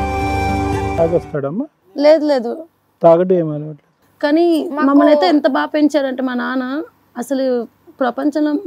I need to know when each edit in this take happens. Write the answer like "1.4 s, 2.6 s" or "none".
0.9 s